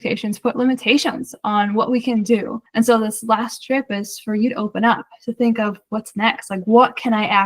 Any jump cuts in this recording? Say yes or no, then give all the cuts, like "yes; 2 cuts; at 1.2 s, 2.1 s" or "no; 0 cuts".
yes; 1 cut; at 2.6 s